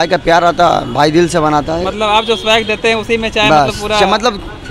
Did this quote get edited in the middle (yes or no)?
no